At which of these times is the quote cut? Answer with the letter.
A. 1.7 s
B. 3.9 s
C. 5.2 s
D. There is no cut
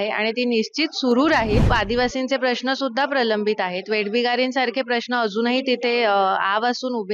A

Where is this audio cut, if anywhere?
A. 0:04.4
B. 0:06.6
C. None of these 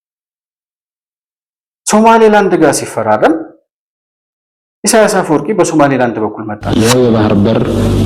B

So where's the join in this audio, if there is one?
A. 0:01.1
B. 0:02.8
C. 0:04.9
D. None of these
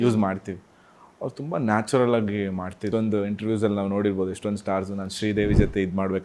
B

